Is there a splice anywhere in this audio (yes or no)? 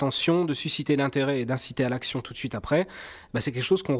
no